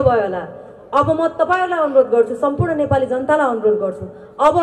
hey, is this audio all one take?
yes; 0 cuts

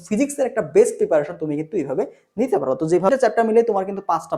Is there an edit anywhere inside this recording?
yes; 1 cut; at 3.1 s

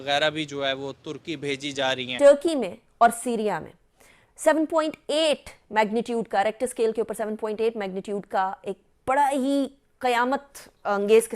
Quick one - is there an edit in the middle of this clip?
yes; 1 cut; at 2.1 s

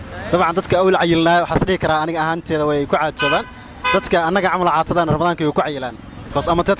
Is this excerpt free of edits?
yes; 0 cuts

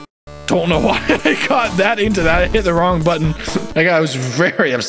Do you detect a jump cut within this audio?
yes; 1 cut; at 3.7 s

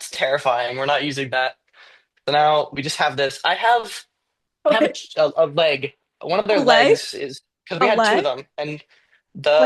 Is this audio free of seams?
yes; 0 cuts

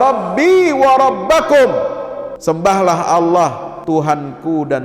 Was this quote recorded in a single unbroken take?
no; 2 cuts; at 2.2 s, 3.7 s

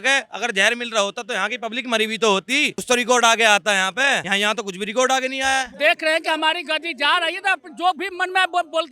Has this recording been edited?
yes; 3 cuts; at 2.8 s, 4.3 s, 5.7 s

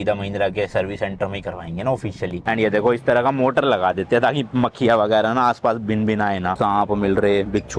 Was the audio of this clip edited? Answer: yes; 2 cuts; at 2.3 s, 6.5 s

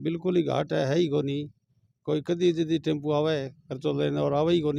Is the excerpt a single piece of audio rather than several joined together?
yes; 0 cuts

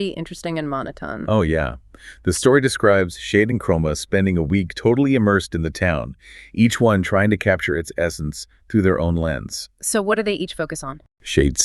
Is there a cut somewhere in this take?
no; 0 cuts

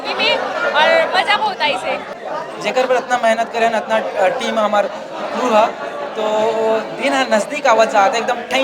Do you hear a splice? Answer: yes; 1 cut; at 2.2 s

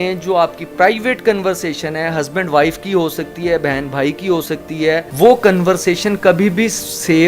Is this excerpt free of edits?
no; 1 cut; at 5.1 s

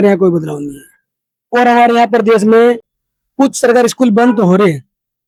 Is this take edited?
no; 0 cuts

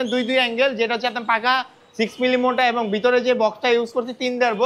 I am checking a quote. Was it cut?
no; 0 cuts

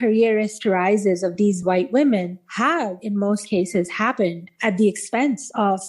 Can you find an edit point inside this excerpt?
no; 0 cuts

